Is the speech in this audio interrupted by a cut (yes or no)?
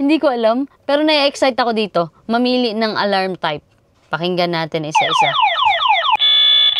no